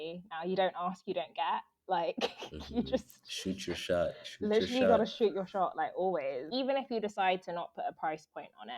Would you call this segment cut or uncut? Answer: cut